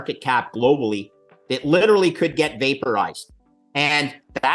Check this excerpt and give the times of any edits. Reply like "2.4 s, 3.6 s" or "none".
none